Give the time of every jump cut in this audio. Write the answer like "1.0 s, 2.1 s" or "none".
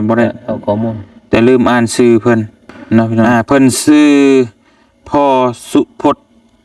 3.2 s